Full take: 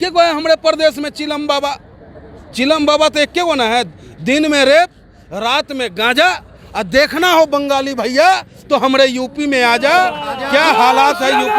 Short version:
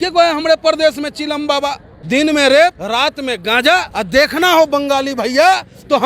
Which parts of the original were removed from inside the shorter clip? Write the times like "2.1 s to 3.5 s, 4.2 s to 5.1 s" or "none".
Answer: 1.9 s to 4.1 s, 5.0 s to 5.3 s, 6.4 s to 6.7 s